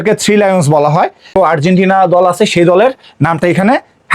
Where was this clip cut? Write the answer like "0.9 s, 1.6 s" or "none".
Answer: 1.3 s